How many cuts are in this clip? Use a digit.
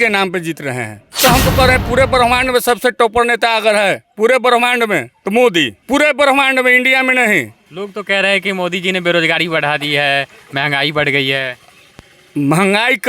4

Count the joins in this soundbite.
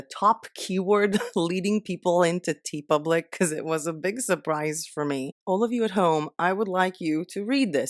1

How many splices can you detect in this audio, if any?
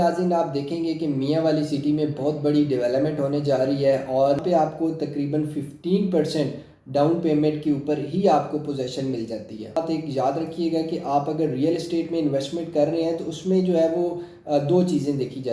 2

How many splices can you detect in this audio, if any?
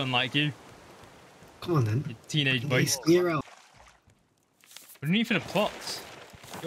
1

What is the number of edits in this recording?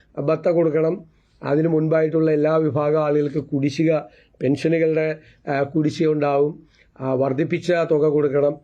0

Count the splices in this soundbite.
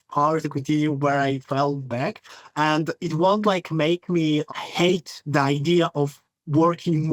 0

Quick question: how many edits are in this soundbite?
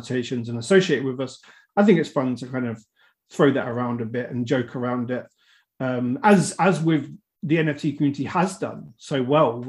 0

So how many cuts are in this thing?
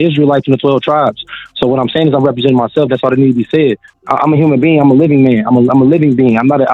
1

